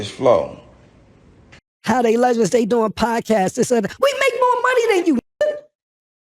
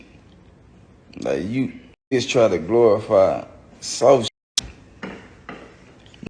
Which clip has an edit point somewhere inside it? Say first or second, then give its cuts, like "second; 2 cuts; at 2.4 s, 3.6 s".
first; 1 cut; at 1.6 s